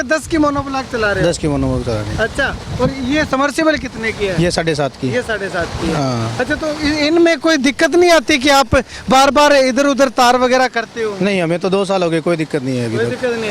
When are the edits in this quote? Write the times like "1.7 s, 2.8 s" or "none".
none